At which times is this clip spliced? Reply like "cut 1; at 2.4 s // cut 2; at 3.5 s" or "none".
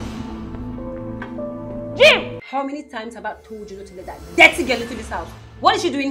cut 1; at 2.4 s